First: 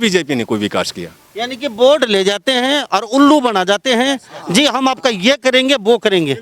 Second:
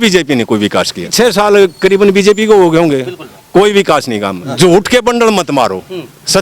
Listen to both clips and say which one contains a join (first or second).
second